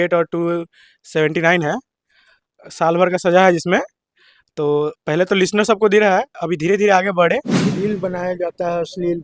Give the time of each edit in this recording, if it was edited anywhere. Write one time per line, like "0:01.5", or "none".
0:07.6